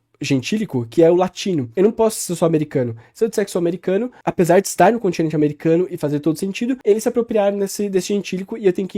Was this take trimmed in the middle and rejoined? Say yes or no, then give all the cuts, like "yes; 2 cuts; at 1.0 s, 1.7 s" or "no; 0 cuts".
yes; 2 cuts; at 1.7 s, 6.8 s